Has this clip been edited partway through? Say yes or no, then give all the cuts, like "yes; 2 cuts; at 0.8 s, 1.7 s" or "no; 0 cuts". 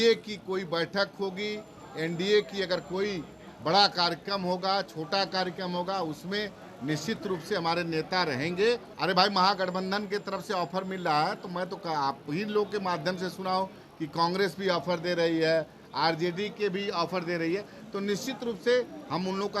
yes; 1 cut; at 8.9 s